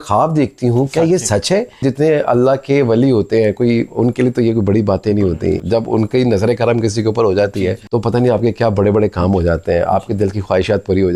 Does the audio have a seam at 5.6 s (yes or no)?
yes